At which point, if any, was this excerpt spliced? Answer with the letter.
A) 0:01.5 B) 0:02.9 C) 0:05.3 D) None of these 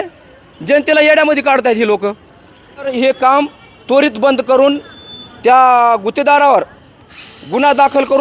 B